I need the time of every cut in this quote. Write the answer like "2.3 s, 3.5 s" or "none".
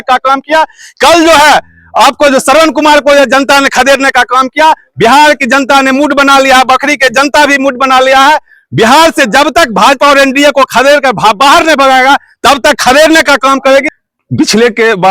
13.9 s